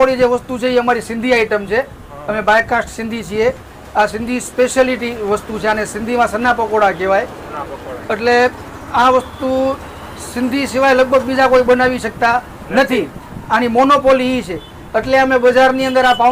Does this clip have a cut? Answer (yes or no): no